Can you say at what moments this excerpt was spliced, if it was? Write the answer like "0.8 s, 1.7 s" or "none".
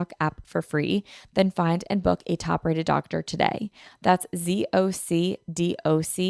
none